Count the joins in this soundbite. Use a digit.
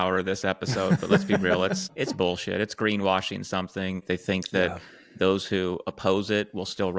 2